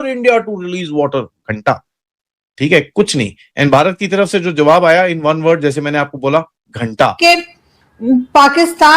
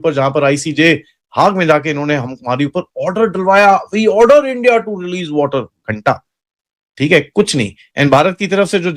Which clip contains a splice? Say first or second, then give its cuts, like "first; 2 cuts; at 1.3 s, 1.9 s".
first; 1 cut; at 7.2 s